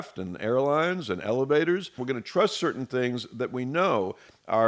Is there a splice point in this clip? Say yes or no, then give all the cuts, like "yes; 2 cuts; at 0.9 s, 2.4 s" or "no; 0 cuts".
yes; 1 cut; at 2.0 s